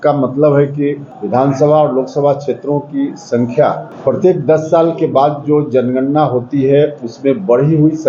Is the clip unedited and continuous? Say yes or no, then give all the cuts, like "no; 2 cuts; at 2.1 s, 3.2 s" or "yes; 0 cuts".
no; 2 cuts; at 1.1 s, 3.9 s